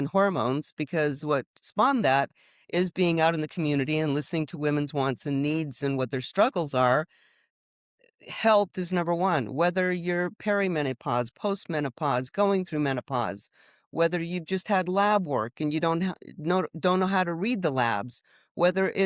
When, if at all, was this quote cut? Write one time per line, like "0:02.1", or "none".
0:01.6